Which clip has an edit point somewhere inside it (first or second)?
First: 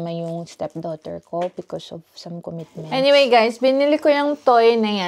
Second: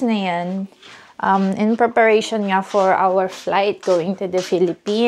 first